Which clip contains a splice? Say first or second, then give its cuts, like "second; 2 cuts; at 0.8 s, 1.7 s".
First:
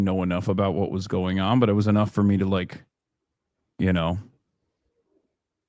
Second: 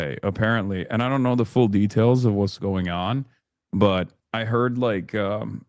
second; 1 cut; at 4.2 s